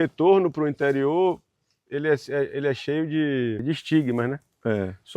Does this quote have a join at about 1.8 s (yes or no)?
no